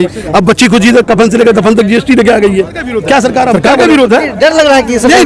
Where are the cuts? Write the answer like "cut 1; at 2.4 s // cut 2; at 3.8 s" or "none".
cut 1; at 3.6 s